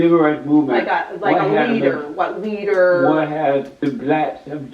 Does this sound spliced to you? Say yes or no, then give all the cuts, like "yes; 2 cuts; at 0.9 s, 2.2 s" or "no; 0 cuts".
yes; 1 cut; at 3.7 s